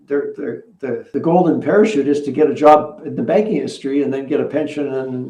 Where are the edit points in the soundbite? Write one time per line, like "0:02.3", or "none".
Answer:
none